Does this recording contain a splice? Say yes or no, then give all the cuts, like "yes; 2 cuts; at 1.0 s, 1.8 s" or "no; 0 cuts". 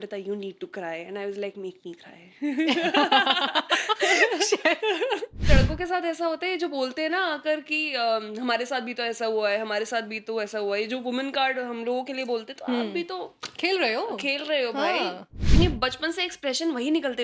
yes; 2 cuts; at 5.5 s, 15.4 s